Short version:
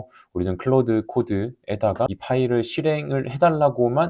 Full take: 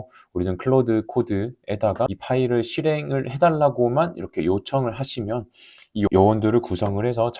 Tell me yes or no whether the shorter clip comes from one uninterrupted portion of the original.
yes